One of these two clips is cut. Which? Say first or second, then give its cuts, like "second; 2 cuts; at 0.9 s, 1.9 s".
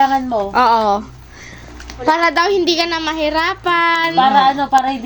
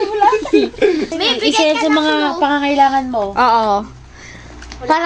second; 1 cut; at 1.1 s